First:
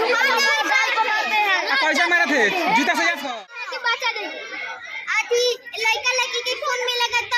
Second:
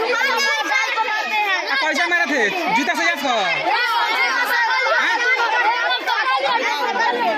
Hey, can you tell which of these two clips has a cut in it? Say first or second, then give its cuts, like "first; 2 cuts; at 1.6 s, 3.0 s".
first; 1 cut; at 3.3 s